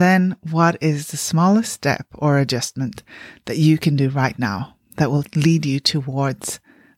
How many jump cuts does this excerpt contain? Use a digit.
1